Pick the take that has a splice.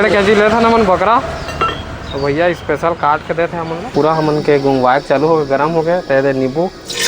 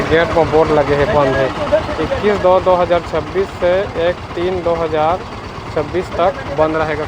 first; 1 cut; at 3.9 s

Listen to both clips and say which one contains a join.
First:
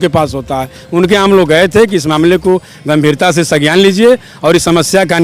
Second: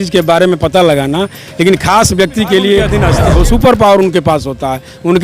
second; 1 cut; at 3.0 s

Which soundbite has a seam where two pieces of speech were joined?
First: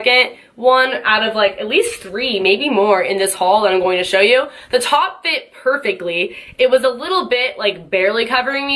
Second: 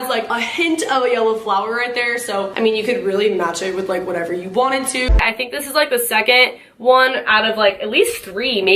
second; 1 cut; at 5.2 s

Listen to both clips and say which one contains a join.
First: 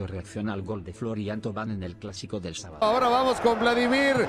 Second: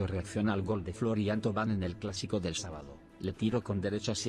first; 1 cut; at 2.8 s

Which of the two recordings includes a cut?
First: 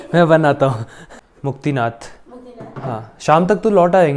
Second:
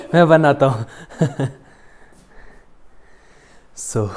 first; 1 cut; at 1.0 s

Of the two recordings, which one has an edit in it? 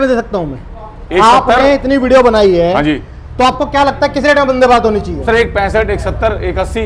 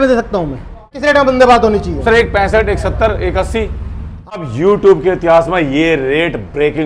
second; 2 cuts; at 1.0 s, 4.4 s

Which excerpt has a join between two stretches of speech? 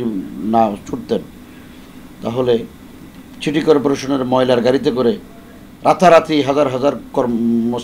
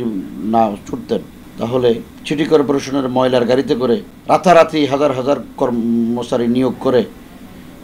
second; 3 cuts; at 1.4 s, 2.1 s, 4.1 s

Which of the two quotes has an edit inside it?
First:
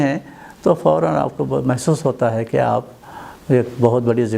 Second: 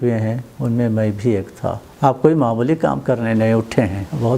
second; 1 cut; at 1.9 s

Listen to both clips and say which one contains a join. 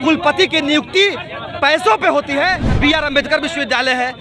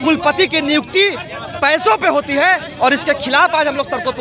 first; 1 cut; at 2.6 s

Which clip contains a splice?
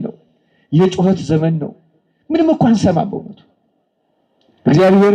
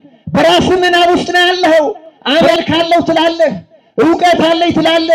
second; 1 cut; at 2.1 s

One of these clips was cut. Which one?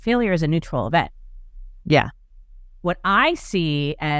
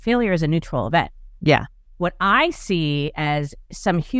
second; 2 cuts; at 1.2 s, 1.8 s

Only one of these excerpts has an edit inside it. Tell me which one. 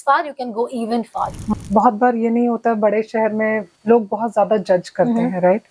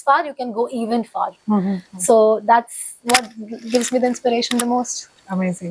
first; 1 cut; at 1.4 s

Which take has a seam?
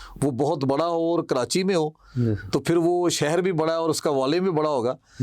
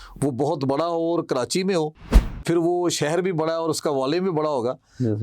second; 1 cut; at 2.3 s

